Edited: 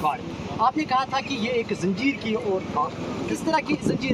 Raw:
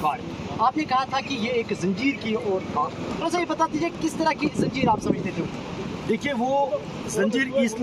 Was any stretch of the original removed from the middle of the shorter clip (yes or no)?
yes